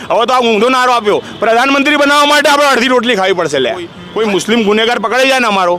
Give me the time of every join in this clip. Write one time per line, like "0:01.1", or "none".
0:04.0